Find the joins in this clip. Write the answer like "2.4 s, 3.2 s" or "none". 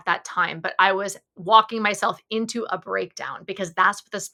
none